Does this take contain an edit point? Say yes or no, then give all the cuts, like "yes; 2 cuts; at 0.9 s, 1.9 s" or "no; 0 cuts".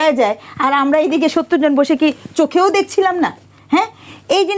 no; 0 cuts